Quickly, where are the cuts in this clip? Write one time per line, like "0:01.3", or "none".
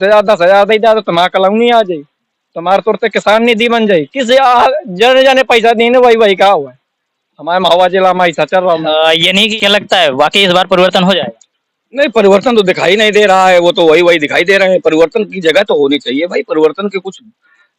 0:09.5